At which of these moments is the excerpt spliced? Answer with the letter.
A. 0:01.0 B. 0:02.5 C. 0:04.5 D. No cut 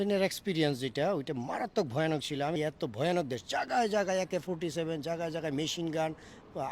B